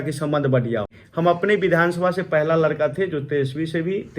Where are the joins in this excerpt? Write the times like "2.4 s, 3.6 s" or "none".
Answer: 1.0 s